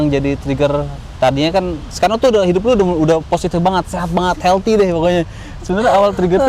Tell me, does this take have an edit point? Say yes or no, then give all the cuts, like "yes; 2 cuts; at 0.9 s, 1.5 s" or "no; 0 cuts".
no; 0 cuts